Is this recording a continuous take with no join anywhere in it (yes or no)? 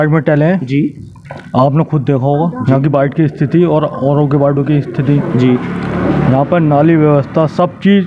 yes